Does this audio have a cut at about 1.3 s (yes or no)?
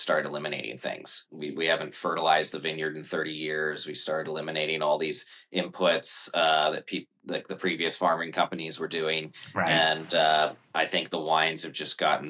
yes